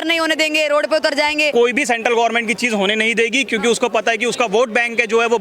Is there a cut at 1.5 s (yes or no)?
yes